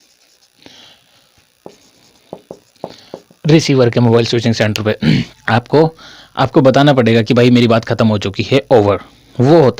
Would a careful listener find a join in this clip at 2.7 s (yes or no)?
no